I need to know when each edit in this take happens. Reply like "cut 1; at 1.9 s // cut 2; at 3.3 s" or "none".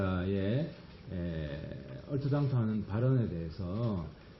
cut 1; at 2.2 s